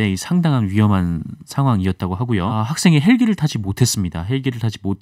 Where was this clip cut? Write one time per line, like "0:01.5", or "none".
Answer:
0:02.7